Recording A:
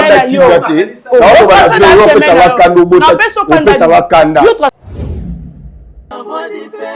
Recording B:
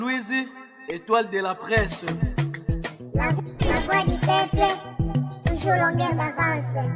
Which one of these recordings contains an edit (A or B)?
A